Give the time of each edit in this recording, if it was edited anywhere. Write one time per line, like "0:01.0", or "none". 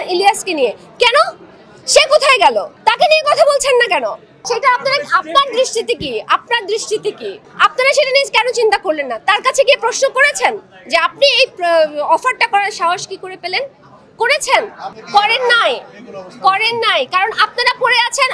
none